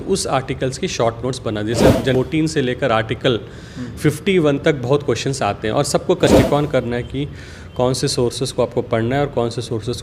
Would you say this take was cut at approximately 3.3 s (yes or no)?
no